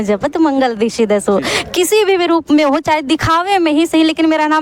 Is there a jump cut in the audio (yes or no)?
no